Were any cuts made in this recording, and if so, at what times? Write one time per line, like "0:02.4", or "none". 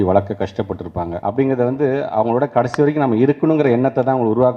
0:01.1